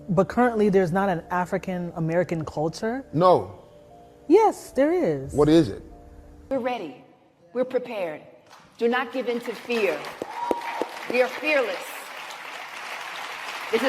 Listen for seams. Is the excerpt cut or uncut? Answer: cut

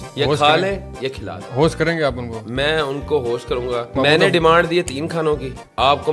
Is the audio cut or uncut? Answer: uncut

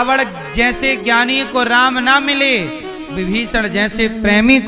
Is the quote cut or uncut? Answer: uncut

